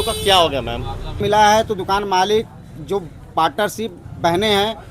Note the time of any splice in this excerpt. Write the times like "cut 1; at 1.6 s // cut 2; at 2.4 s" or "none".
cut 1; at 1.2 s